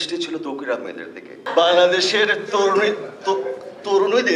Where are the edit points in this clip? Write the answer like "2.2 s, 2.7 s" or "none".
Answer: 1.4 s